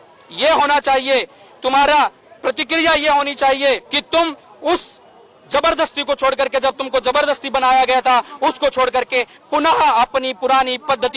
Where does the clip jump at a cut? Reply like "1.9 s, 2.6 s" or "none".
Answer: 3.9 s